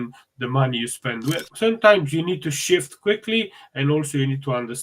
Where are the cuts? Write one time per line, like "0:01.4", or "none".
0:01.5